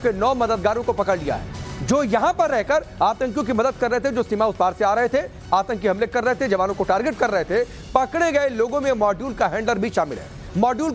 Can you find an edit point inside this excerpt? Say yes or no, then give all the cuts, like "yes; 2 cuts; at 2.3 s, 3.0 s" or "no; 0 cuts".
no; 0 cuts